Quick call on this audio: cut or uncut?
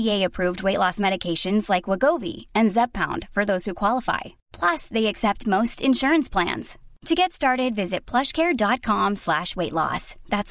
uncut